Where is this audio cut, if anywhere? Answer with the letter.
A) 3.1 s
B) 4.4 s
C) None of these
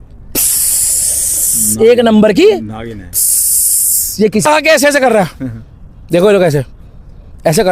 B